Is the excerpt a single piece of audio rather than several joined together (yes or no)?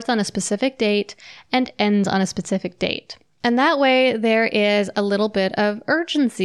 yes